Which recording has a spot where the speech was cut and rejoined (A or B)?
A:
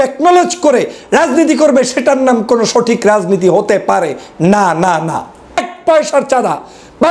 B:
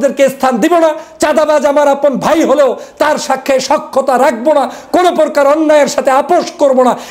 A